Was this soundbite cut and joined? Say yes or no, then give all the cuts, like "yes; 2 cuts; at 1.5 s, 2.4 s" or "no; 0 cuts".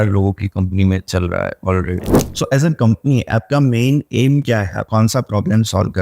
yes; 2 cuts; at 2.2 s, 4.8 s